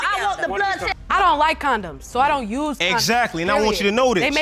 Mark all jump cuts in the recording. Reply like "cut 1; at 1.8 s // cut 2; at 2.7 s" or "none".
cut 1; at 0.9 s